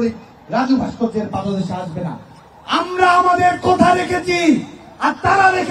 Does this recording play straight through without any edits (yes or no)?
yes